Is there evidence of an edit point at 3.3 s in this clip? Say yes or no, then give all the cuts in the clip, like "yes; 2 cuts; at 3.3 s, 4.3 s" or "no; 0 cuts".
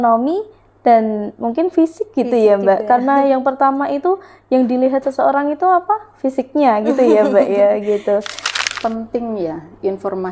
no; 1 cut; at 8.5 s